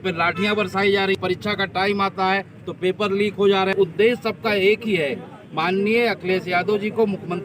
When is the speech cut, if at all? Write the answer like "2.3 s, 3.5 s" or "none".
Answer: 1.2 s, 3.7 s